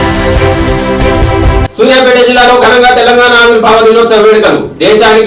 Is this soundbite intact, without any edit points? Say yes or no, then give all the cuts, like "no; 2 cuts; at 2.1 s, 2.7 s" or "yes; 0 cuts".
no; 1 cut; at 1.6 s